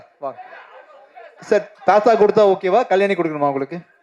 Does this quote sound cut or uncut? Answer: cut